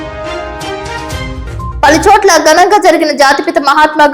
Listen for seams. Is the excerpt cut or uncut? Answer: cut